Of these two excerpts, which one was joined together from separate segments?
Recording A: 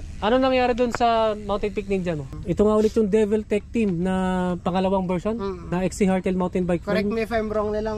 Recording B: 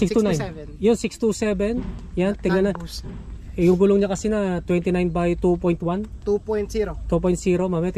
A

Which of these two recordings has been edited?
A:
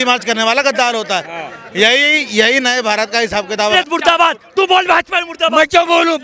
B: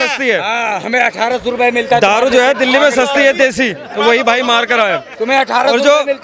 A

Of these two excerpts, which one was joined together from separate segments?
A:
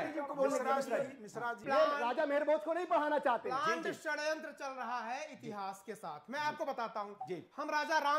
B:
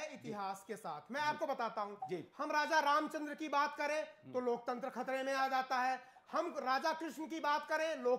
A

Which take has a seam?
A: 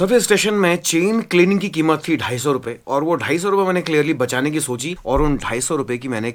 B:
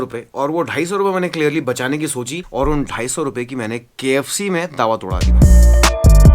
B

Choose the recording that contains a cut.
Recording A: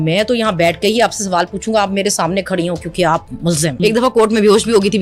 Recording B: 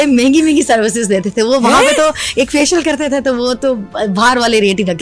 A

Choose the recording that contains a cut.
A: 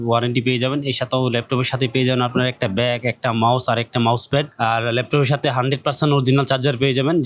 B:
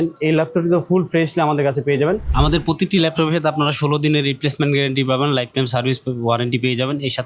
B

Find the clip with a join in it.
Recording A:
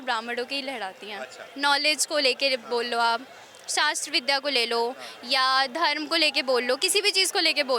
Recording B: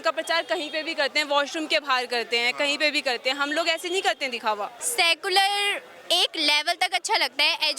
B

